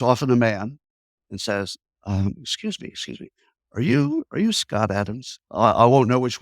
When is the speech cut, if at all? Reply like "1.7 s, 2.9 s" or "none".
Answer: 5.4 s